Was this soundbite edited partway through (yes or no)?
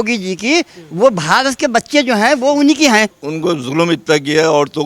yes